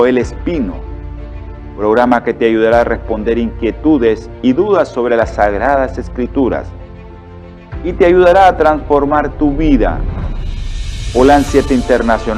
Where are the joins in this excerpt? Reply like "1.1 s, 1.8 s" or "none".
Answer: none